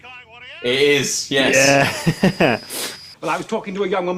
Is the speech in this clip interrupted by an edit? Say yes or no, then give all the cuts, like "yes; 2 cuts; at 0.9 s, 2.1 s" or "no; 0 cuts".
yes; 1 cut; at 2.6 s